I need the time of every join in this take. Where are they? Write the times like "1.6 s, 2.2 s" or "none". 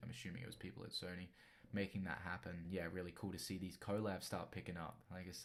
none